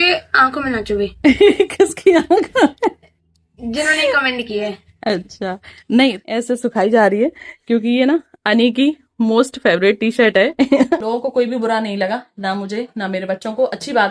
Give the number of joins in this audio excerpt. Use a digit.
2